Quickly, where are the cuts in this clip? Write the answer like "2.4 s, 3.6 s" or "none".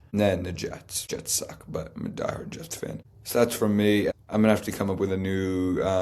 0.9 s, 3.1 s, 4.1 s